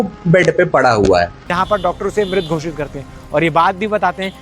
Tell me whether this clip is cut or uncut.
cut